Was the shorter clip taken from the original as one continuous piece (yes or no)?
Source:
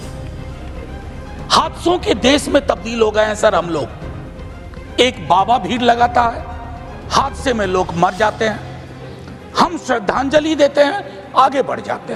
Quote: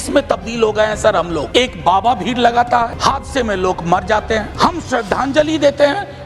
no